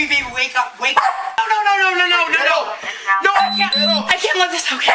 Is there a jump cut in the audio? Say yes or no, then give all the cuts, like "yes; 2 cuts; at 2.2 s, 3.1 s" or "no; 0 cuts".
no; 0 cuts